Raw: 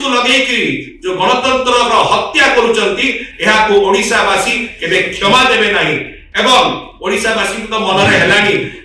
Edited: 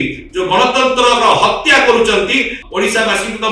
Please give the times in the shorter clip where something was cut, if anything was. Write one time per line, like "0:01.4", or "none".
0:02.6

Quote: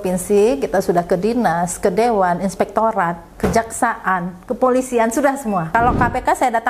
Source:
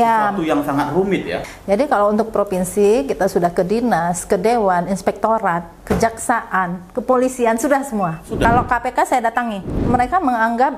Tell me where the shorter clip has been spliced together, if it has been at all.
0:05.7

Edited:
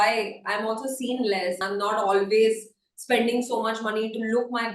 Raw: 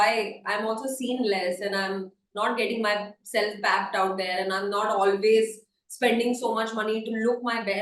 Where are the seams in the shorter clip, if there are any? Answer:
0:01.6

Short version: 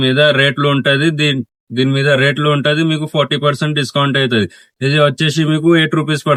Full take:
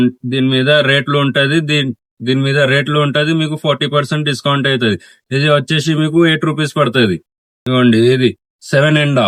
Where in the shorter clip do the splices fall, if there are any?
none

